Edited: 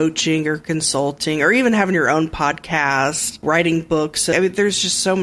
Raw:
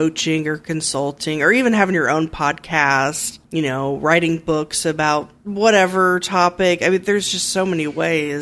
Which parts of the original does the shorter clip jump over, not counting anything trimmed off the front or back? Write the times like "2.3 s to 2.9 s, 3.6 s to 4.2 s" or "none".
3.4 s to 4.0 s, 4.9 s to 6.8 s